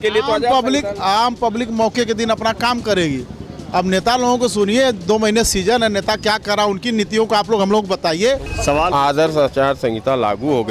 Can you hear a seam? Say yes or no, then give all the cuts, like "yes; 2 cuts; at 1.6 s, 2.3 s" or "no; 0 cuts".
yes; 1 cut; at 8.4 s